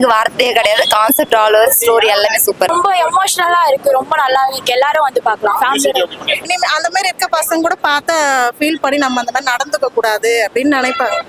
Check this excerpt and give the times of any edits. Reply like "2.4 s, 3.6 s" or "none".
2.7 s, 6.5 s

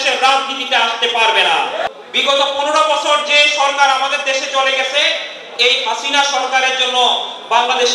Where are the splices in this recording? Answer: 1.9 s

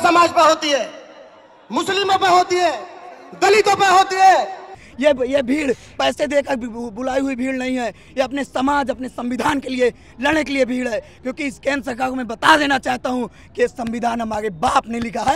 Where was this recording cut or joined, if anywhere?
4.8 s

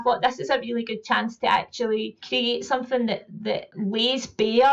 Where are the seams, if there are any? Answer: 2.2 s, 3.7 s

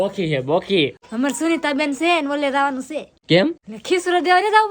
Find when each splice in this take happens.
1.0 s, 3.1 s, 3.7 s

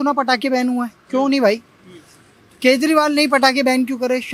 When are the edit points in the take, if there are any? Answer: none

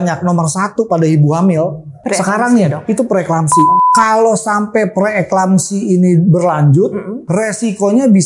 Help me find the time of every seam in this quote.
1.9 s, 3.8 s, 7.2 s

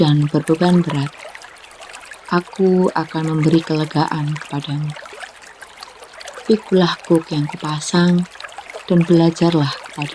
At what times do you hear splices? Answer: none

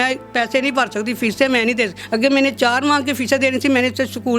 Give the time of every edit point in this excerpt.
2.0 s

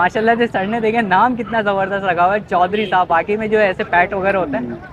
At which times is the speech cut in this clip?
none

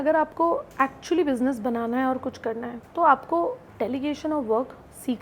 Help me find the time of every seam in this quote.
3.6 s

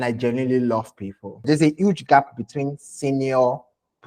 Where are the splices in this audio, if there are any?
1.4 s

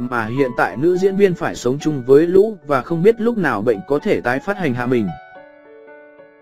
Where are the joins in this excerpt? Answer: 5.3 s

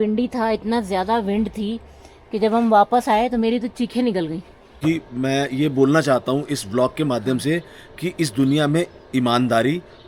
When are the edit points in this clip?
4.7 s

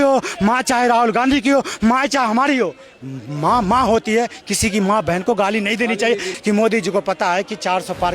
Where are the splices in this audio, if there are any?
6.3 s

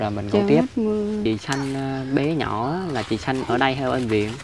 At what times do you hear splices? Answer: 1.2 s

